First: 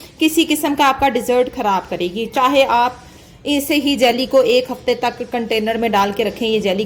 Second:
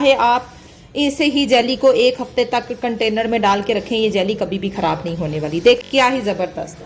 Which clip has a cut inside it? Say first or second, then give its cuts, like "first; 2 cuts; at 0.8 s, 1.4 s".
second; 1 cut; at 5.8 s